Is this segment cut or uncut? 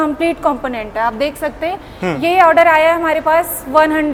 uncut